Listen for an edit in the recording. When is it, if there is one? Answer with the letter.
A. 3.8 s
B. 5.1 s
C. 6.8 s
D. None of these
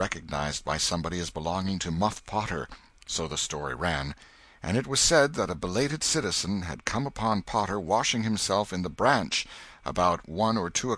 C